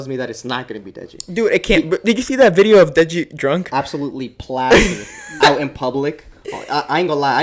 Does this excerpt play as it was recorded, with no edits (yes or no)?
yes